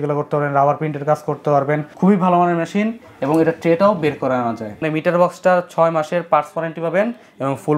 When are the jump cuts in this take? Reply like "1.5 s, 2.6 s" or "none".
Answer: 1.9 s, 4.8 s